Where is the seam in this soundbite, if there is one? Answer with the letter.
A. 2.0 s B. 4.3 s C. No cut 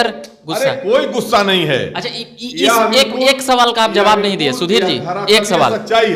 C